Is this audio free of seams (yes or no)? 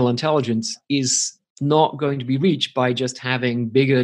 yes